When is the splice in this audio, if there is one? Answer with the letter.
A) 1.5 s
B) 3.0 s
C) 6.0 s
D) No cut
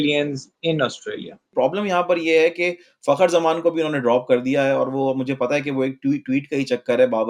A